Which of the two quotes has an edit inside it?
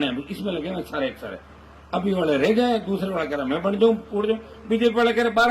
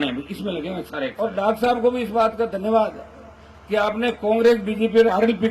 second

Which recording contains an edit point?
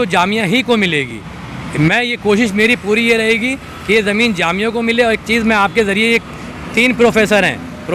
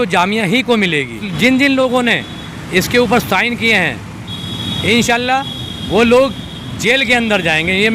second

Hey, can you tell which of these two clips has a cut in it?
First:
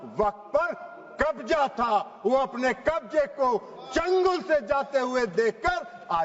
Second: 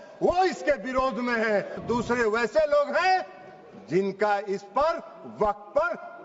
second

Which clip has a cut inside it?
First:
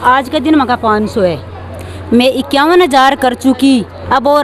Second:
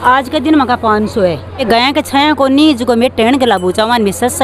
second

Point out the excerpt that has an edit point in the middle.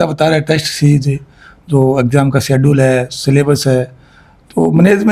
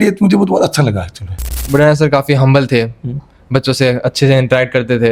second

